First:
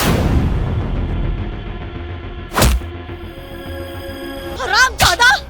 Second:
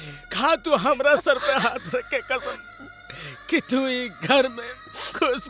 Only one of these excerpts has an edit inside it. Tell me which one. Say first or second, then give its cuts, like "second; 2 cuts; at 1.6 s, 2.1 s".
first; 1 cut; at 4.5 s